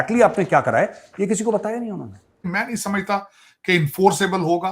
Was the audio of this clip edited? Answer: yes; 1 cut; at 2.4 s

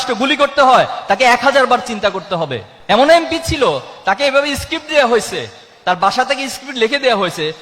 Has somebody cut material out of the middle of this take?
yes; 1 cut; at 2.7 s

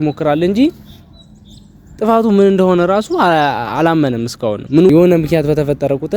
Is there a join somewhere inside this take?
yes; 1 cut; at 4.9 s

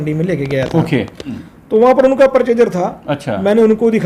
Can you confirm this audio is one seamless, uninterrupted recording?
no; 1 cut; at 1.4 s

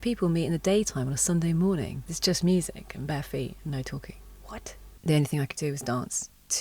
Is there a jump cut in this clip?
yes; 2 cuts; at 2.0 s, 4.8 s

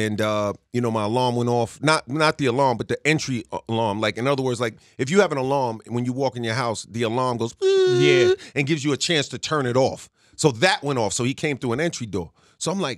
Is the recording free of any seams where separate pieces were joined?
yes; 0 cuts

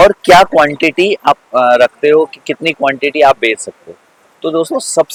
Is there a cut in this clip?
no; 0 cuts

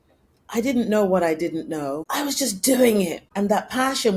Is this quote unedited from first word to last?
no; 2 cuts; at 2.0 s, 3.2 s

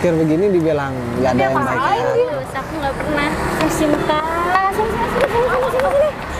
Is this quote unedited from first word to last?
yes; 0 cuts

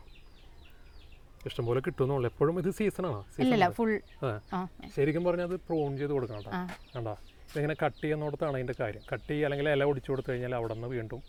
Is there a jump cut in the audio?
no; 0 cuts

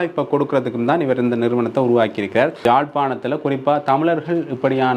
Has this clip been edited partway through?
yes; 1 cut; at 2.6 s

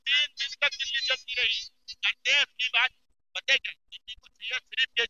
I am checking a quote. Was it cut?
no; 0 cuts

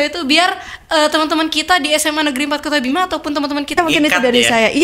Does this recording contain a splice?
yes; 1 cut; at 3.8 s

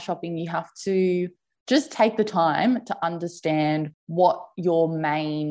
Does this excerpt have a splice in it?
yes; 1 cut; at 4.0 s

